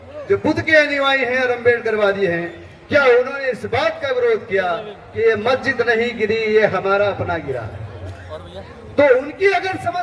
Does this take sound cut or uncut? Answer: uncut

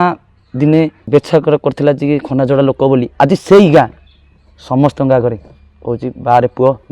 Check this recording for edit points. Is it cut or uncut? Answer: cut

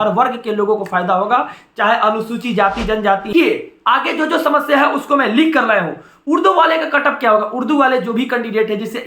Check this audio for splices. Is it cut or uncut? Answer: cut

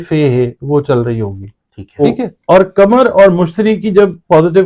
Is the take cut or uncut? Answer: cut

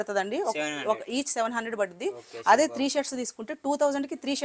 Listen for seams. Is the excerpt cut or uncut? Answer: uncut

